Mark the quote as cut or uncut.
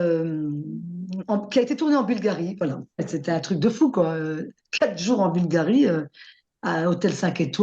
cut